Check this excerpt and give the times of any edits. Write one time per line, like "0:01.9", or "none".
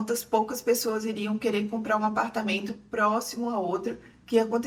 none